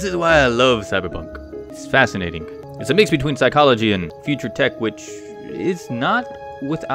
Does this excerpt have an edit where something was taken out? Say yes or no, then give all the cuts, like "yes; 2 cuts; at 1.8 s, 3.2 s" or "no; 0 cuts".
yes; 3 cuts; at 1.7 s, 2.6 s, 4.1 s